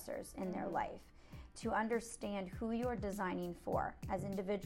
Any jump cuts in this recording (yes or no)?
no